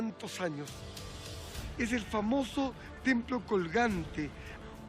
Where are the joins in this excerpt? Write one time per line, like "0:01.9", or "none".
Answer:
0:01.1